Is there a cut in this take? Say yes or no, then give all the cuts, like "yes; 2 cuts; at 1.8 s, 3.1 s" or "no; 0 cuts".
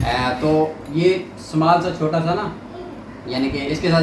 no; 0 cuts